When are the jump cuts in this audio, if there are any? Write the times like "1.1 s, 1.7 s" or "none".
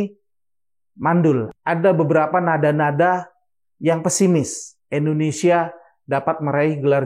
1.5 s